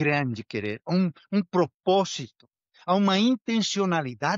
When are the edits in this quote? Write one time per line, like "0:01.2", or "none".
none